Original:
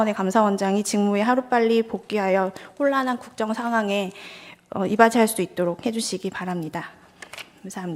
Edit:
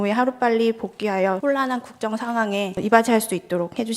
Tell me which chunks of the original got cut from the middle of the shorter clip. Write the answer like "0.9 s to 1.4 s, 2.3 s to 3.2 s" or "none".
2.5 s to 2.8 s, 4.1 s to 4.8 s